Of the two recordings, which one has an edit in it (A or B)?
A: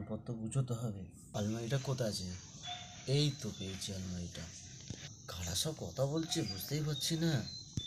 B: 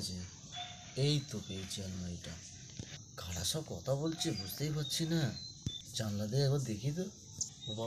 A